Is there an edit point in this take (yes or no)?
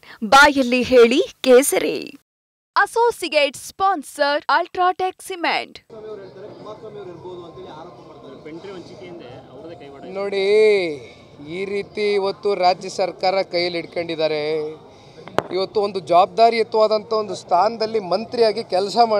yes